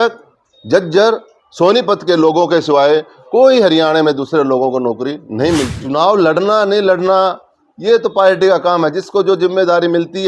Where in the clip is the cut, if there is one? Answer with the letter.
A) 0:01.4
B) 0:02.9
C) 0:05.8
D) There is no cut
C